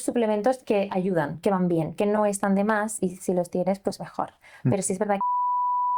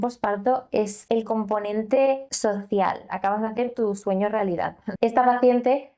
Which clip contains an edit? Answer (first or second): second